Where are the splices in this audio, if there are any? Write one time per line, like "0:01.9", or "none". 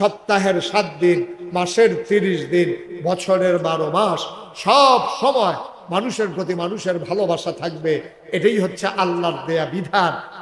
none